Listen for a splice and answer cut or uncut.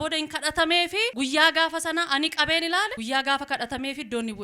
cut